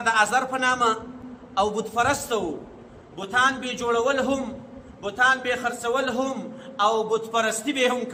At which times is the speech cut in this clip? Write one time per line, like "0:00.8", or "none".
none